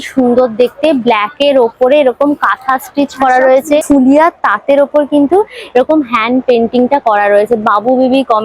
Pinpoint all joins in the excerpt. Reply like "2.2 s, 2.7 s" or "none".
3.8 s